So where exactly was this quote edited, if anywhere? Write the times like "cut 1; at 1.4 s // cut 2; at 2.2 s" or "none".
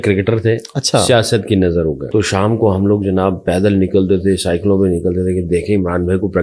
cut 1; at 2.0 s